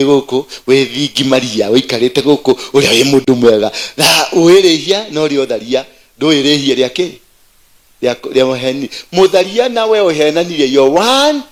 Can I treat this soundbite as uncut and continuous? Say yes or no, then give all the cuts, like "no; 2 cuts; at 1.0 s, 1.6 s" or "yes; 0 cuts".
yes; 0 cuts